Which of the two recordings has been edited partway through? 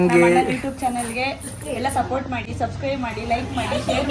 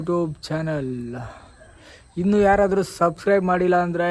first; 1 cut; at 2.4 s

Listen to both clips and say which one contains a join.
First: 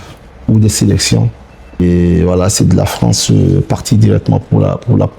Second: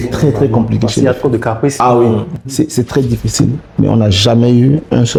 first; 1 cut; at 1.8 s

